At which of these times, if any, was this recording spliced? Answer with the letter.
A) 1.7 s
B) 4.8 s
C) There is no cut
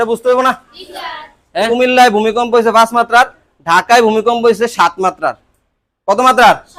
A